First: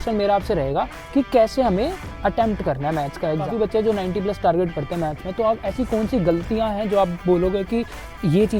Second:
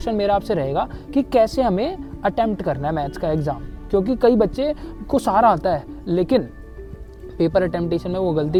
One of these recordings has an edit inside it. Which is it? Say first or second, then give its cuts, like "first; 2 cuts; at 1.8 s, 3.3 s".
first; 1 cut; at 3.5 s